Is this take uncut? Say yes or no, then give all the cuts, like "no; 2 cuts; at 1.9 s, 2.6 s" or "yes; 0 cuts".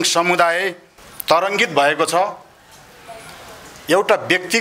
yes; 0 cuts